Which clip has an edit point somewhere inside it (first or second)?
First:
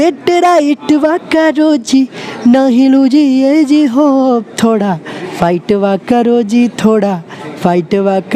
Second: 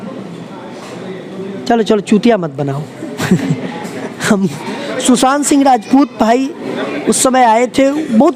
second